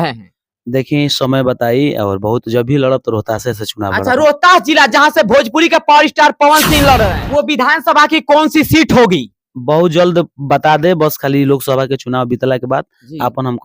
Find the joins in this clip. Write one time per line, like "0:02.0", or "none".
0:07.2